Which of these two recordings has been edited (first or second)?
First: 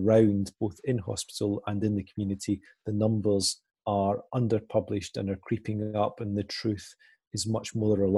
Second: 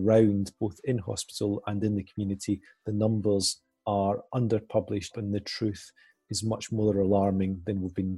second